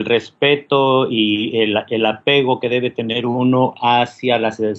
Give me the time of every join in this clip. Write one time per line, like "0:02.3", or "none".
0:02.2

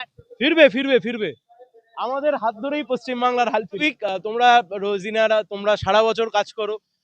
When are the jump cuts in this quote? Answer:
0:03.8

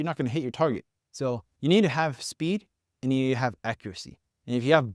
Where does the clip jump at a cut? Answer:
none

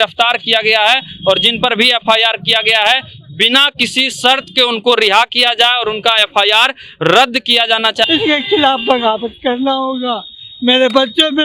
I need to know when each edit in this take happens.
0:08.1

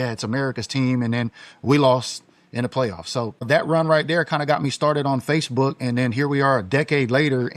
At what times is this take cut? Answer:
0:03.4

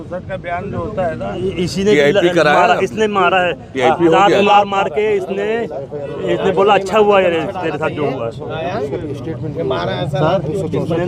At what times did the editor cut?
none

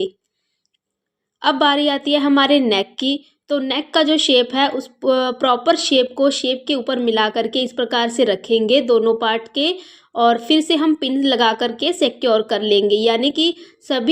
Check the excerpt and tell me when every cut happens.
none

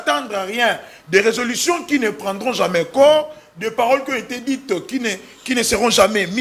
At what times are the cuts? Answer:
none

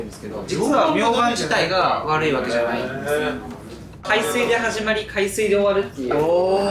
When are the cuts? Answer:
0:04.0

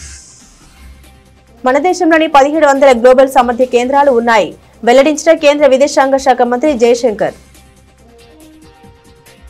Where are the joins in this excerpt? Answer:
none

